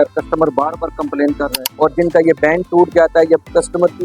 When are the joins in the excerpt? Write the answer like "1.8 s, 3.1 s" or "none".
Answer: 1.6 s